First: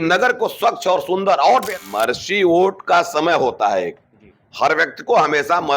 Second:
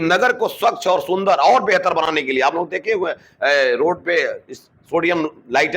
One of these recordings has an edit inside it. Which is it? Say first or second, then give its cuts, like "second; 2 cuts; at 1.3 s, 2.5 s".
first; 1 cut; at 1.7 s